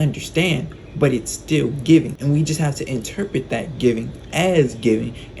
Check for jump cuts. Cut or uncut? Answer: cut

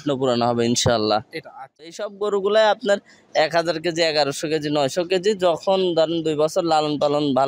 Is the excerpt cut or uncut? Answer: cut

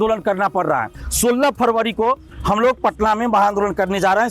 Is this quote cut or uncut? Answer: cut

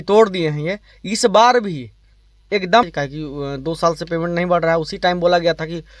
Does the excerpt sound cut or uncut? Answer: cut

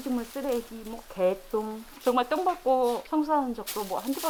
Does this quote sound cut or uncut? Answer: uncut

